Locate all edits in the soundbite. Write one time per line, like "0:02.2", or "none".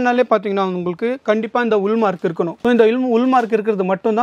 none